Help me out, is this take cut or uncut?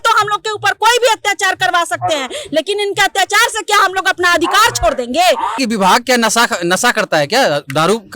cut